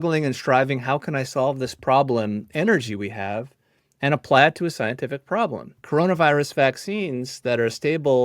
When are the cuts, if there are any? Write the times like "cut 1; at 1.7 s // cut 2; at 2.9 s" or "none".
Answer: cut 1; at 5.8 s